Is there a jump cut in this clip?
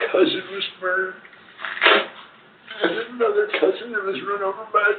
no; 0 cuts

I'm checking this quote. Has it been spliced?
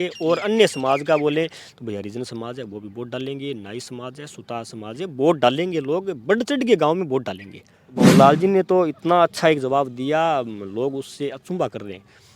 yes; 1 cut; at 8.0 s

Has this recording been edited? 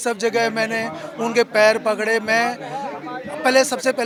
no; 0 cuts

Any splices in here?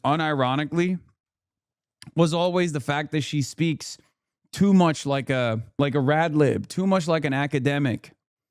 yes; 1 cut; at 5.6 s

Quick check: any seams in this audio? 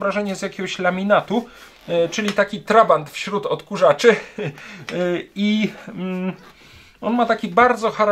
no; 0 cuts

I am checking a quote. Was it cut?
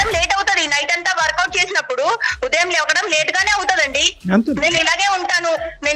no; 0 cuts

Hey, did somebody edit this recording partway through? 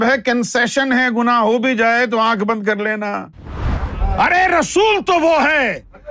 yes; 1 cut; at 3.6 s

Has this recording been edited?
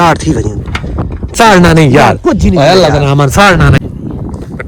yes; 2 cuts; at 1.4 s, 3.8 s

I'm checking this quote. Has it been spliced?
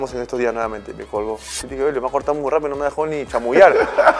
yes; 1 cut; at 1.5 s

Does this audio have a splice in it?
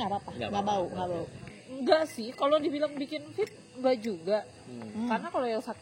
yes; 1 cut; at 1.5 s

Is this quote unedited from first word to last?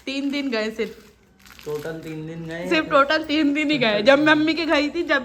yes; 0 cuts

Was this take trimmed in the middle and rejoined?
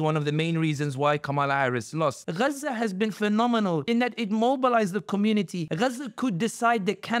yes; 3 cuts; at 2.2 s, 3.8 s, 5.6 s

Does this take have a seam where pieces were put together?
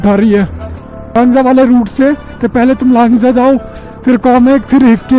yes; 1 cut; at 1.1 s

